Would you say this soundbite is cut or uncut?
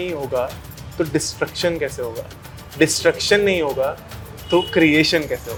uncut